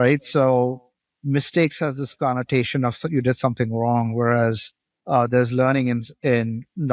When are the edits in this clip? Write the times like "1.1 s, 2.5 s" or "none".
none